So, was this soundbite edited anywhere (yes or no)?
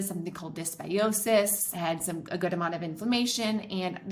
yes